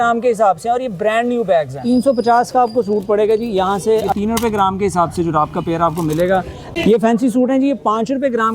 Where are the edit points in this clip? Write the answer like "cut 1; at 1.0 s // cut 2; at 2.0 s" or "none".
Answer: cut 1; at 1.8 s // cut 2; at 4.1 s // cut 3; at 6.6 s